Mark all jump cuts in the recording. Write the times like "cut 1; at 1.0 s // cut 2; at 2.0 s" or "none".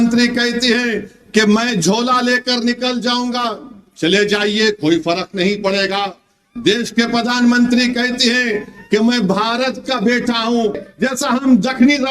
cut 1; at 10.8 s